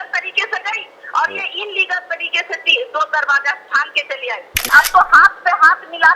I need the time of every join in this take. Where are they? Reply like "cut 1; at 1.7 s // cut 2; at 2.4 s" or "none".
cut 1; at 4.7 s